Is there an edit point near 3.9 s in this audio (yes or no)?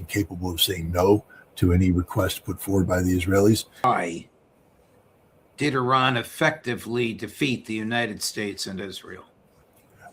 yes